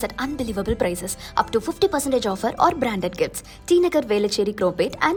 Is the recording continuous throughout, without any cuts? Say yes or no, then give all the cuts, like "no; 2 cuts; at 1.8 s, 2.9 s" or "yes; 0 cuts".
yes; 0 cuts